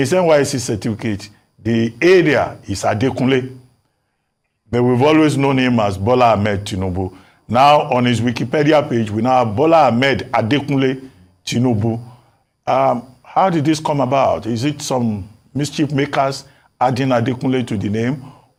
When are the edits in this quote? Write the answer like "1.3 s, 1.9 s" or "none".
none